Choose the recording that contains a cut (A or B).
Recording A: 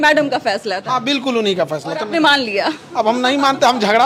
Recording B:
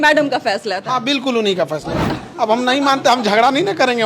B